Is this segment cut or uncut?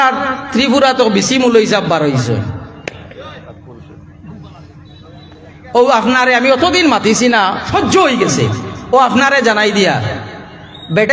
cut